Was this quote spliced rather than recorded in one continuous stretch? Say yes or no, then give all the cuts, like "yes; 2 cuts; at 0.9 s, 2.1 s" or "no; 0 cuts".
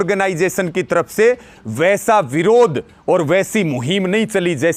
no; 0 cuts